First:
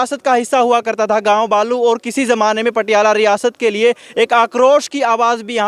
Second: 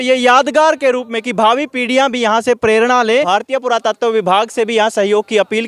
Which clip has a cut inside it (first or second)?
second